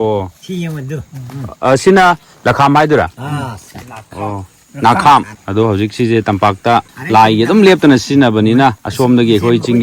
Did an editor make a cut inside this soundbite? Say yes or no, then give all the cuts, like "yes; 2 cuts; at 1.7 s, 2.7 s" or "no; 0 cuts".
yes; 3 cuts; at 5.4 s, 7.0 s, 8.9 s